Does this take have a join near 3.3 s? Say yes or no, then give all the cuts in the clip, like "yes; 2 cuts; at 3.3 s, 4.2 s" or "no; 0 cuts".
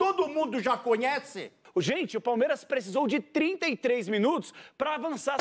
no; 1 cut; at 1.6 s